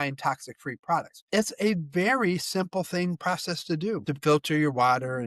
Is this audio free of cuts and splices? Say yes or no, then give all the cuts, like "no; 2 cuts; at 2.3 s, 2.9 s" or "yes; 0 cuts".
no; 2 cuts; at 1.2 s, 4.1 s